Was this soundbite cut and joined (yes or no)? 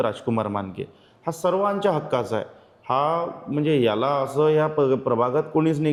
no